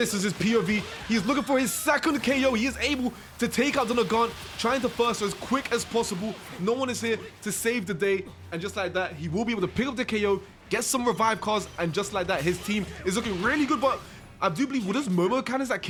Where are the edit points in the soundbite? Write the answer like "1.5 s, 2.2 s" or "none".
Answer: none